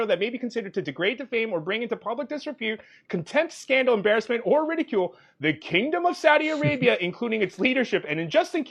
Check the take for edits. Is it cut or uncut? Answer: uncut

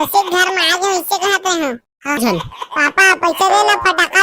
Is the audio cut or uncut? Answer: cut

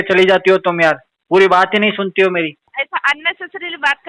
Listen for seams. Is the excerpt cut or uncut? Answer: cut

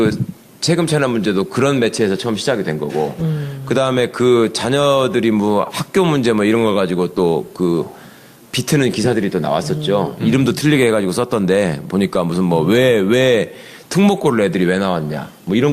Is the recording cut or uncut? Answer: cut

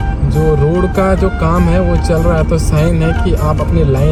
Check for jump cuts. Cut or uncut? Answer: uncut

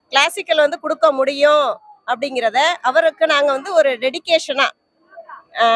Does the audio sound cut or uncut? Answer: uncut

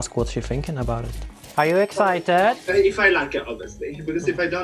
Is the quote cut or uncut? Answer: cut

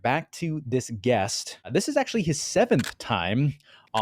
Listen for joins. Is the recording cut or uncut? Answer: cut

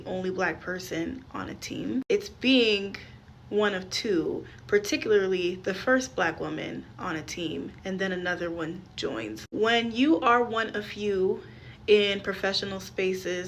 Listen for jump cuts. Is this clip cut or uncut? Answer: uncut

